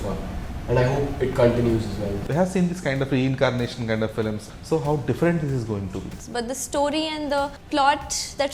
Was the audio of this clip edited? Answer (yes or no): yes